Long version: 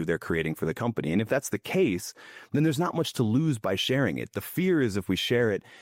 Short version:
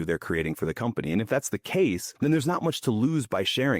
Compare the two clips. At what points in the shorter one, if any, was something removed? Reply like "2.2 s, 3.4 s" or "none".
2.1 s